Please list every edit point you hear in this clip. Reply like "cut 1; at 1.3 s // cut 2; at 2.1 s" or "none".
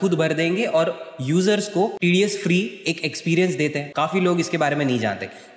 cut 1; at 1.9 s // cut 2; at 3.9 s

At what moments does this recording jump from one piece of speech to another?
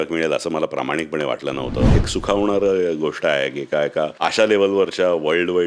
cut 1; at 1.9 s // cut 2; at 4.1 s

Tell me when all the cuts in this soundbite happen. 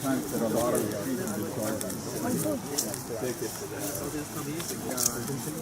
cut 1; at 1.0 s

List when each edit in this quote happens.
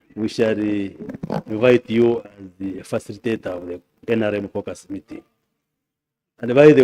none

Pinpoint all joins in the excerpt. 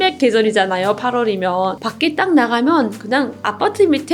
cut 1; at 1.8 s

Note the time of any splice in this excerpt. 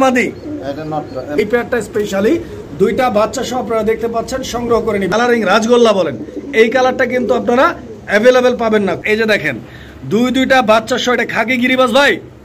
cut 1; at 1.3 s // cut 2; at 5.1 s // cut 3; at 8.6 s

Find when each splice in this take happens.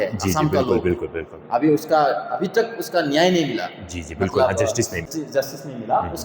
cut 1; at 5.0 s

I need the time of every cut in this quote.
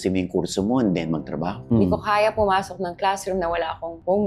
cut 1; at 1.5 s

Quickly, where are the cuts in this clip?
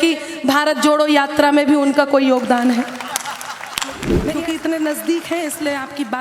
cut 1; at 4.1 s

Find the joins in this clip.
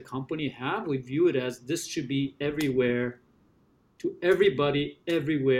none

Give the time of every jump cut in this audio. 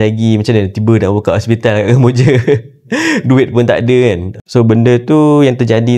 cut 1; at 4.3 s

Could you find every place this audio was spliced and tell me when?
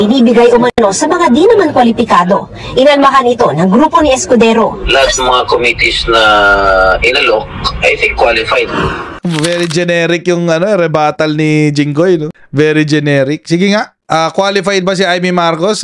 none

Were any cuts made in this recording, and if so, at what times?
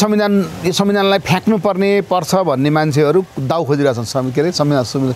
none

